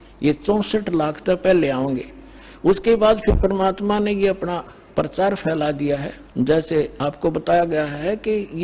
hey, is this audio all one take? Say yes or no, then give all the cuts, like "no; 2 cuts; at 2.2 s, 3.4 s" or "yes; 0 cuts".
no; 2 cuts; at 6.2 s, 6.9 s